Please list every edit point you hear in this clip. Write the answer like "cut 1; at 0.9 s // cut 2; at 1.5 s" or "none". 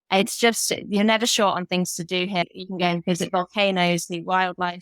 cut 1; at 2.4 s